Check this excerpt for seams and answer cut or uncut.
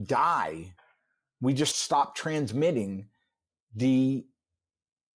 cut